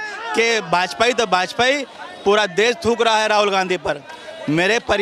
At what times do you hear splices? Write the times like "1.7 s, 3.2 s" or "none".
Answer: none